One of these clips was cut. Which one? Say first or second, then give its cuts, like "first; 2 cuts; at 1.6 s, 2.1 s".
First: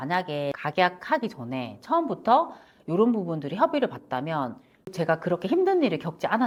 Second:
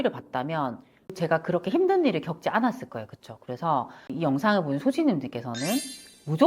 second; 1 cut; at 4.1 s